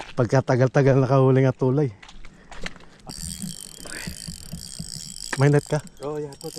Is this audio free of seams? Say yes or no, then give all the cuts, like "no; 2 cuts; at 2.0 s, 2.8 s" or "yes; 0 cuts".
no; 1 cut; at 2.9 s